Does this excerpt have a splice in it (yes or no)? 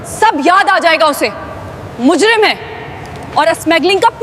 no